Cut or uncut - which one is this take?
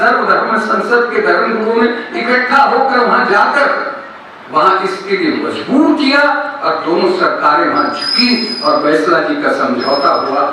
uncut